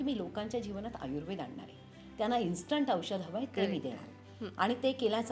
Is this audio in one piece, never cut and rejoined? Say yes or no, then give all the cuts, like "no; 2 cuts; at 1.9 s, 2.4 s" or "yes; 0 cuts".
yes; 0 cuts